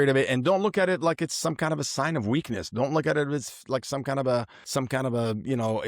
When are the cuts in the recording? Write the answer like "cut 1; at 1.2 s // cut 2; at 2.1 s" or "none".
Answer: cut 1; at 4.6 s